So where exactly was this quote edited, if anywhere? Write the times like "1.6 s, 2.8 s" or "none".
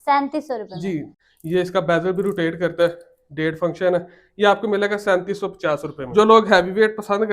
1.2 s, 6.0 s